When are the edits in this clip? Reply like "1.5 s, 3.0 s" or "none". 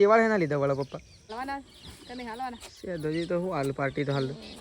1.3 s